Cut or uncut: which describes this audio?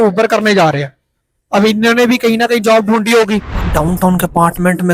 cut